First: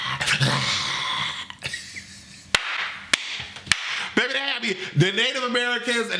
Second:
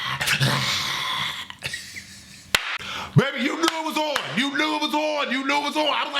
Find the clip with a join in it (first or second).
second